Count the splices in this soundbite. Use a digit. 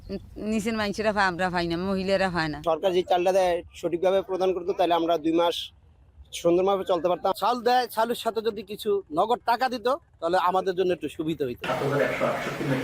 3